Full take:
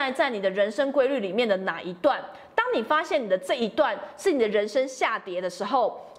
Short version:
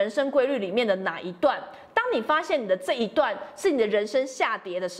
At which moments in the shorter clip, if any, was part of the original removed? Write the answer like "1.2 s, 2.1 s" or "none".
none